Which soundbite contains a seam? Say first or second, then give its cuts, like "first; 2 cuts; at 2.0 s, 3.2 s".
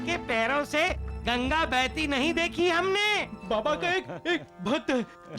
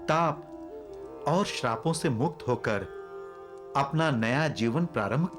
first; 1 cut; at 3.3 s